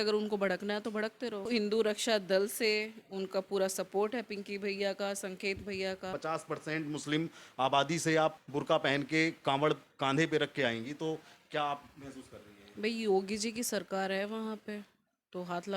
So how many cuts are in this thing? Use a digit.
3